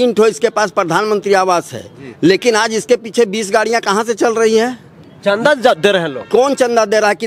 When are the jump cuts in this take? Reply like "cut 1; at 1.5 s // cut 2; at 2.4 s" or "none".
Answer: none